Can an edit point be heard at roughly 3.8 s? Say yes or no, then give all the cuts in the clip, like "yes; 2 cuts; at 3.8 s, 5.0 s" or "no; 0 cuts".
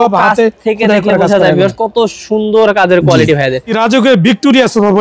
yes; 1 cut; at 3.8 s